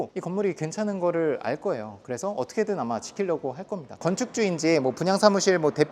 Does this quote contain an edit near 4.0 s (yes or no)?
yes